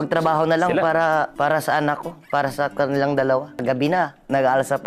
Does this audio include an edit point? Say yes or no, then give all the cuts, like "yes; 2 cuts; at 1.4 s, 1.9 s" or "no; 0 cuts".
yes; 2 cuts; at 1.3 s, 3.6 s